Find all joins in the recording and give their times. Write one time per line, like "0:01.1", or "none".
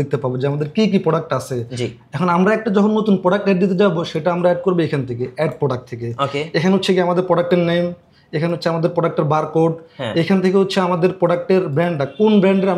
none